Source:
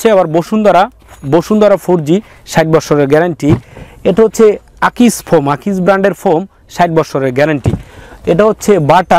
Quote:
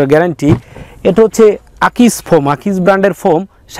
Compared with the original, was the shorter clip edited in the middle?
no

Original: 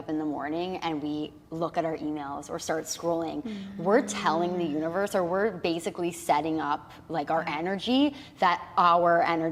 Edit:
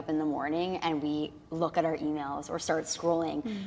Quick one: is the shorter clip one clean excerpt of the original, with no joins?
yes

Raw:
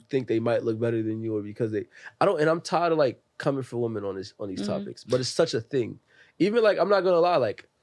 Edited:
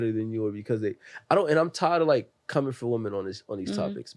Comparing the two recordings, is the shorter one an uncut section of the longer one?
yes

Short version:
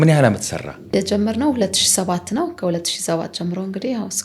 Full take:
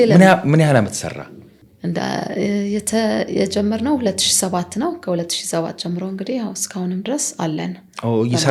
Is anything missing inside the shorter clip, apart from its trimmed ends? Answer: yes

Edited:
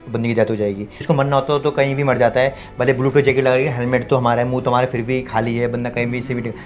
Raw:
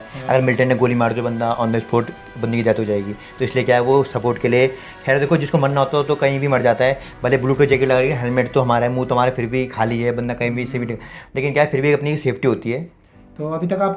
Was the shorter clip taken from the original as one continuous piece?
no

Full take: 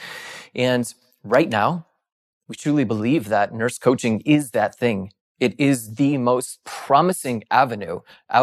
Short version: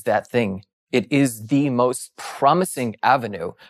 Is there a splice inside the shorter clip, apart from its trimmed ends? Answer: no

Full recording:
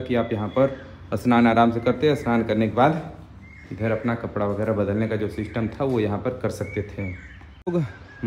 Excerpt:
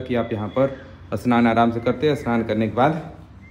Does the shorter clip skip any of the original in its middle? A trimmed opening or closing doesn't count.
no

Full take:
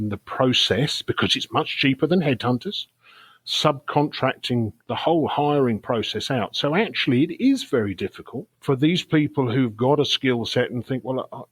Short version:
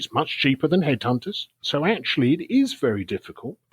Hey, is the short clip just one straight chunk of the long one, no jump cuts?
no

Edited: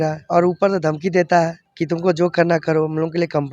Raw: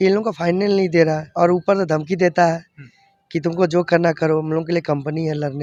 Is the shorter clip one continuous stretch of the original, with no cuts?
no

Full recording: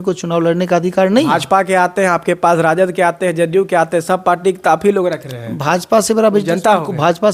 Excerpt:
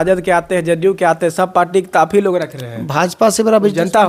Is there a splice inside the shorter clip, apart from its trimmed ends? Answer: no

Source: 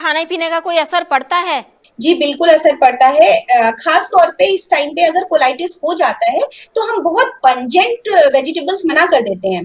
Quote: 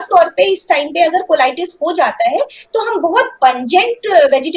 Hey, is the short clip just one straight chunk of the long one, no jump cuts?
yes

